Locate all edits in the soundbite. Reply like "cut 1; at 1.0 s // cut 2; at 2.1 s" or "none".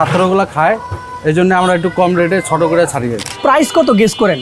cut 1; at 3.2 s